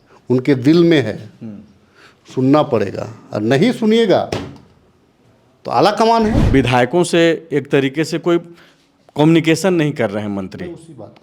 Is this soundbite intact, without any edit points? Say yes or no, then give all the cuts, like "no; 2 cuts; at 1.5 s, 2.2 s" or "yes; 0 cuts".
no; 1 cut; at 6.4 s